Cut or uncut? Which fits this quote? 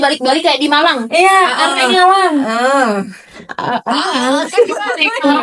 uncut